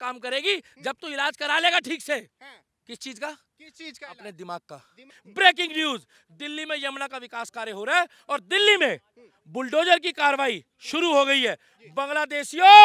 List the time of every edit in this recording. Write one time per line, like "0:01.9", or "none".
0:05.2